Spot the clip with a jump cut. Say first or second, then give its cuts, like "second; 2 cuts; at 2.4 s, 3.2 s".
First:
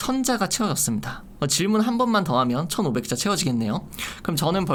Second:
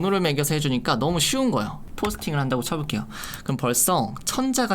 second; 1 cut; at 1.8 s